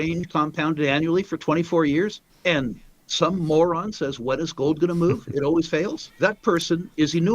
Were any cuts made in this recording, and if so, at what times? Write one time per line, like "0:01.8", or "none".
0:02.3
0:06.0